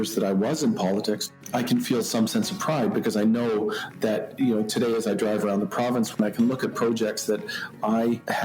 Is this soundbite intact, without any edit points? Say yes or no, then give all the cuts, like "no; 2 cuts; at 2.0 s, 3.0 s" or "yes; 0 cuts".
yes; 0 cuts